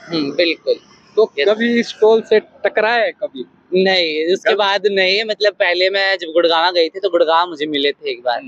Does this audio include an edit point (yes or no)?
no